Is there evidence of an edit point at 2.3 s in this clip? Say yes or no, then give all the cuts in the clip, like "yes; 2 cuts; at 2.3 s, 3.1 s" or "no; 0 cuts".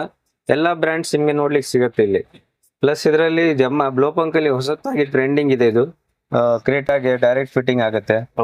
no; 0 cuts